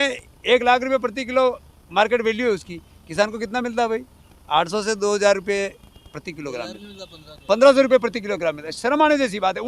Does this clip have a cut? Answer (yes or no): no